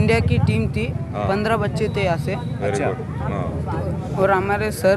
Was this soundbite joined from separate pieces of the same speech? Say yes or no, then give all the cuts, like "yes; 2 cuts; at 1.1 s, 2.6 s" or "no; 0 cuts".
no; 0 cuts